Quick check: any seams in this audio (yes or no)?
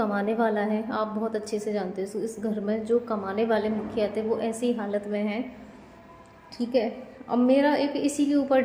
no